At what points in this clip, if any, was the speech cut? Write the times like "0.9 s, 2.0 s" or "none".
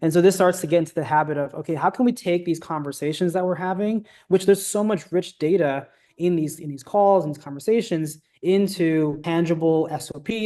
9.2 s